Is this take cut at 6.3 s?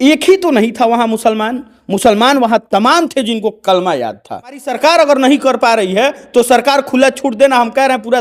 no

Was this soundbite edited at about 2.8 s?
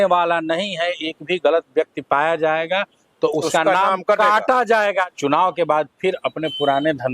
no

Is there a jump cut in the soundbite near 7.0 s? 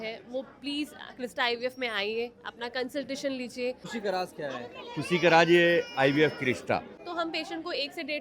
yes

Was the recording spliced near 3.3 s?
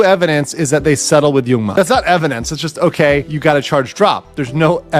yes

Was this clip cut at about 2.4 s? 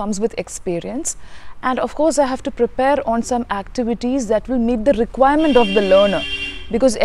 no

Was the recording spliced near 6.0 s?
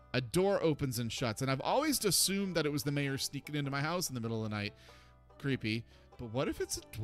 yes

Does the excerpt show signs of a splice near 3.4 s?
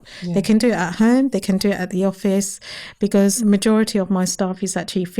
yes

